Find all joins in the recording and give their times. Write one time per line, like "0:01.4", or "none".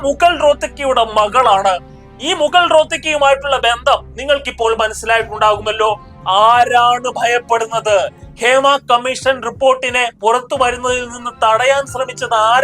none